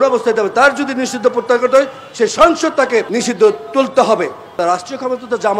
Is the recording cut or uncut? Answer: cut